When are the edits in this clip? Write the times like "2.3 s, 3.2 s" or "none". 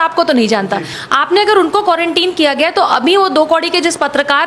0.9 s